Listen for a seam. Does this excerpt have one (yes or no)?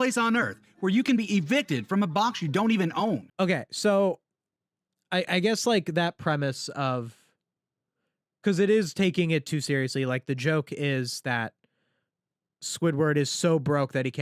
no